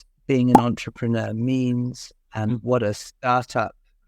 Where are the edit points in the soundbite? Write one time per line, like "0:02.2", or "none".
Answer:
none